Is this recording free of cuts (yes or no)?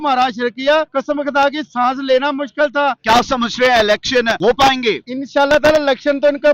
no